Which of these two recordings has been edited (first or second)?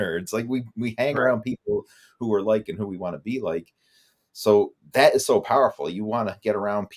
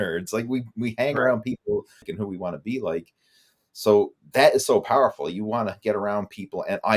second